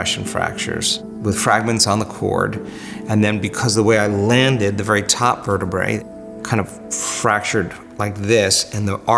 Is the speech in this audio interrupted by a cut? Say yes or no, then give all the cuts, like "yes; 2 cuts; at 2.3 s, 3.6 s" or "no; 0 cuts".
yes; 2 cuts; at 1.1 s, 6.1 s